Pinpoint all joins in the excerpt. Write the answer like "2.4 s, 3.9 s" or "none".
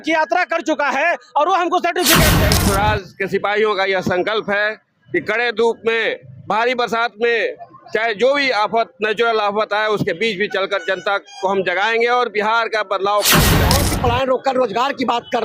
2.4 s, 13.7 s